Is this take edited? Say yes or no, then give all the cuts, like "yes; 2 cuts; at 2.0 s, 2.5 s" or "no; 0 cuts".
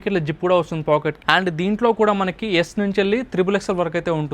yes; 1 cut; at 1.2 s